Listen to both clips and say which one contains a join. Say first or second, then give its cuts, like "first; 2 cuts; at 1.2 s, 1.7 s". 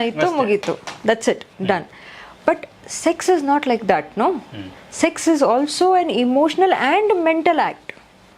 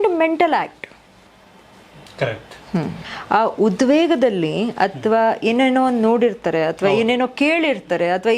second; 1 cut; at 3.1 s